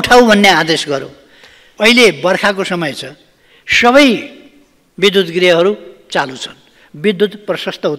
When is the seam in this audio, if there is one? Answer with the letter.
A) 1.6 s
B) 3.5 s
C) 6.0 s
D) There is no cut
A